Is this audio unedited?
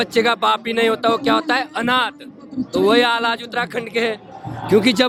yes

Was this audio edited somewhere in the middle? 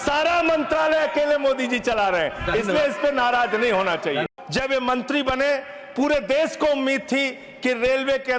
yes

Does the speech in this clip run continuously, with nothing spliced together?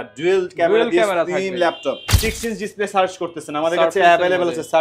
no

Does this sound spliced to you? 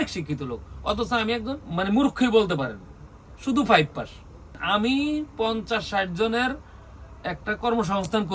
yes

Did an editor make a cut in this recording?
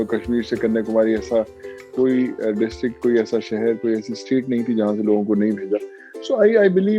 no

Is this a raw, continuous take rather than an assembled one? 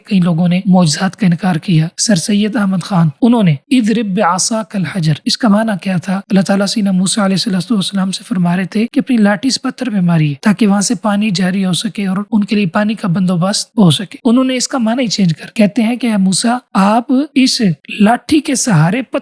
no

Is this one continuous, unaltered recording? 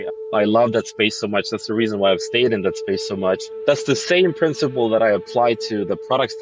yes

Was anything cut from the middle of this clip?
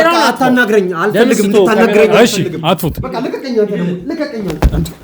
no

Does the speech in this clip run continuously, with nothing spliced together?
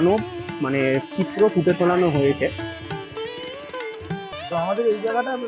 no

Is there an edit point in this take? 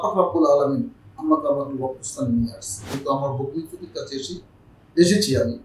yes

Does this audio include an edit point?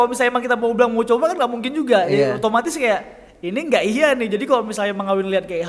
no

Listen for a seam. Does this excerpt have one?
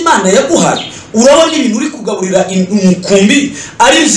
no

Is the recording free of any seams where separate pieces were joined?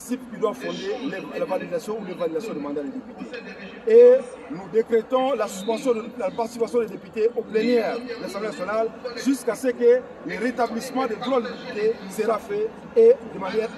yes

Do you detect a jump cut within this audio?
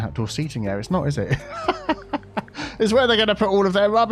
no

